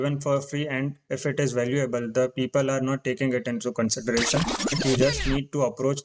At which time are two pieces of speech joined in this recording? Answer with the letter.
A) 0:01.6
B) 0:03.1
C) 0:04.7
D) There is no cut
C